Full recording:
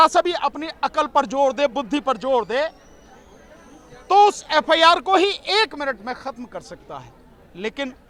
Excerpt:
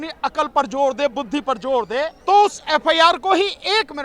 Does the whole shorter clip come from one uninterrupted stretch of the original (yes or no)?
no